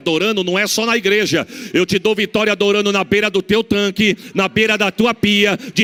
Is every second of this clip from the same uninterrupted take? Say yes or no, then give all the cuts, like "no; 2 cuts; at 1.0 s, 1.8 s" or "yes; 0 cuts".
yes; 0 cuts